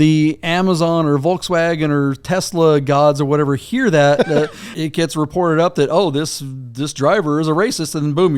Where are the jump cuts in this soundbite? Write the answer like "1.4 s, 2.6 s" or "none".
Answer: 4.6 s